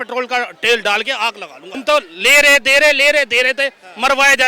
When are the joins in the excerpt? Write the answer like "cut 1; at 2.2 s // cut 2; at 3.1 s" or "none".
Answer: cut 1; at 1.7 s